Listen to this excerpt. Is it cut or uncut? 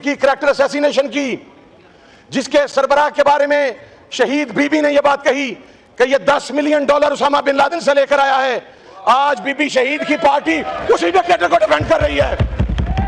uncut